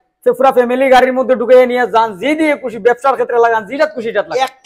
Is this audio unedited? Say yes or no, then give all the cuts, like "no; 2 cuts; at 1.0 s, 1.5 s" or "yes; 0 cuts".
yes; 0 cuts